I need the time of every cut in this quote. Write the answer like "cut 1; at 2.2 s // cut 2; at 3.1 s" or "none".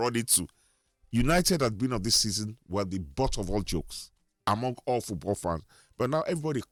none